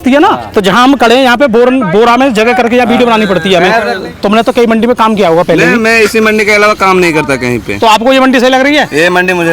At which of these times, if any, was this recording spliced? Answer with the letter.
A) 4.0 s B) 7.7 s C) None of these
A